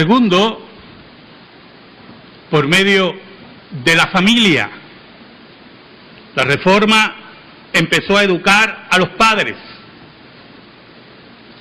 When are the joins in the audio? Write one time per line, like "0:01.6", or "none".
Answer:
0:08.1